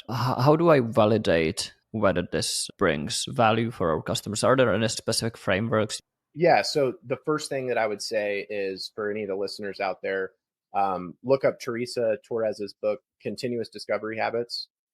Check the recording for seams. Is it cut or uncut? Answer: cut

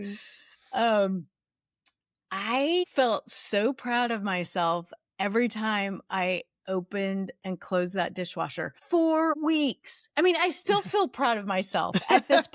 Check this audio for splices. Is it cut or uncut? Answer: cut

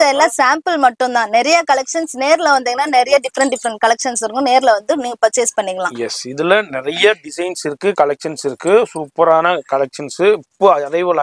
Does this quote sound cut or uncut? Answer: uncut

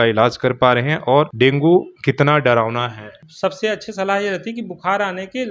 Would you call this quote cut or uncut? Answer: cut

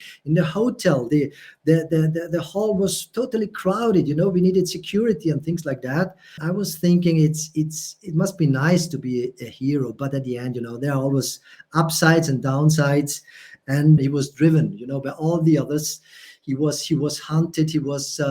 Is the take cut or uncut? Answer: cut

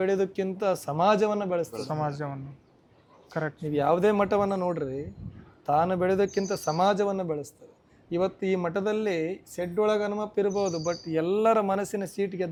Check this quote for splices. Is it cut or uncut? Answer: uncut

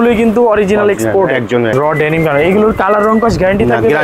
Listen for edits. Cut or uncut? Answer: cut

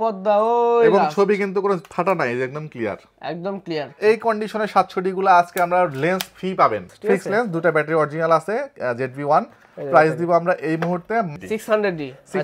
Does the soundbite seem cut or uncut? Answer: cut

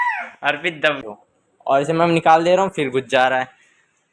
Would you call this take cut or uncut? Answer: cut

